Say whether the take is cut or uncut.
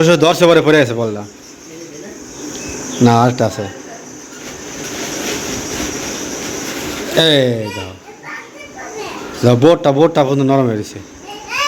uncut